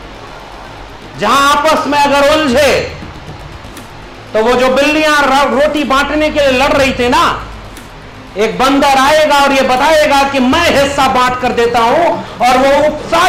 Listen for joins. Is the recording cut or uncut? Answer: uncut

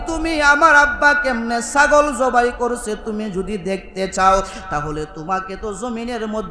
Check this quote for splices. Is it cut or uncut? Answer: uncut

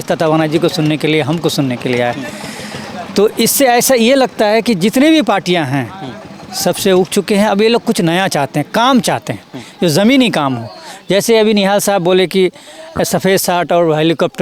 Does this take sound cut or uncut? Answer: uncut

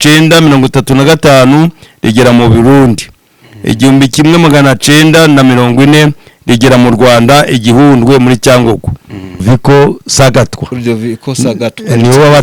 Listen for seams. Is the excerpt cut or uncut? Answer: cut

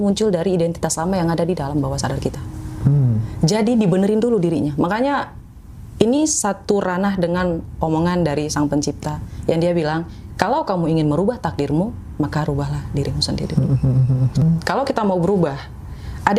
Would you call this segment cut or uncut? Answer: cut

